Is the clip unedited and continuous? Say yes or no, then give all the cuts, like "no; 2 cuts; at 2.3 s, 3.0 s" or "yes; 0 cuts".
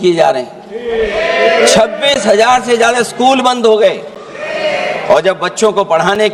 yes; 0 cuts